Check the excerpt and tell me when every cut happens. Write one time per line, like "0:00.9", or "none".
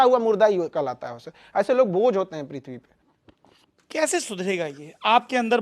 none